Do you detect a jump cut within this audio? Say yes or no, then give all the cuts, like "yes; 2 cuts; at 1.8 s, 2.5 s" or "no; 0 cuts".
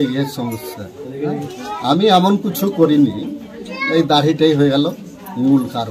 no; 0 cuts